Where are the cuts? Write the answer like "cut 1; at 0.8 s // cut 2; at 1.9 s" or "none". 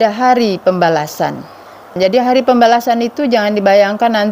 cut 1; at 1.9 s